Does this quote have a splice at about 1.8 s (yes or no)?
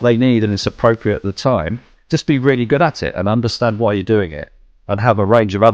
no